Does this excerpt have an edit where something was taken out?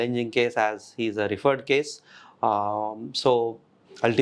no; 0 cuts

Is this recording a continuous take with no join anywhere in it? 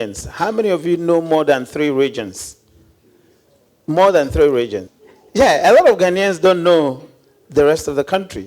no; 1 cut; at 4.8 s

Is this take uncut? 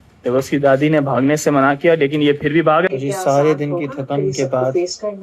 no; 1 cut; at 2.9 s

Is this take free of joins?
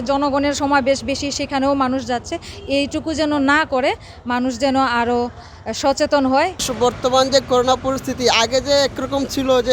yes; 0 cuts

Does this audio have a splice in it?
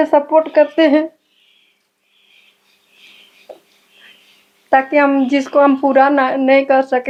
no; 0 cuts

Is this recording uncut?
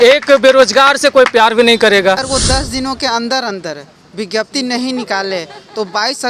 no; 1 cut; at 2.2 s

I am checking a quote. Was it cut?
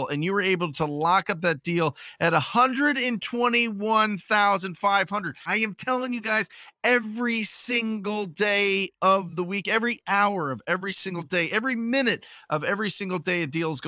yes; 1 cut; at 5.4 s

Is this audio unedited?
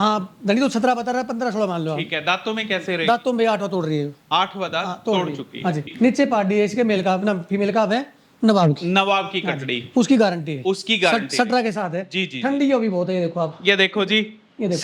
no; 1 cut; at 5.9 s

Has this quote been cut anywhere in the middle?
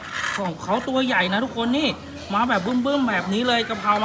no; 0 cuts

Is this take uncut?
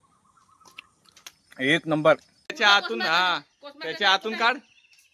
no; 1 cut; at 2.6 s

